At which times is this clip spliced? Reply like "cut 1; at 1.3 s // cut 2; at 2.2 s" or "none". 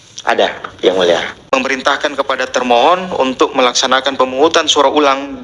cut 1; at 1.4 s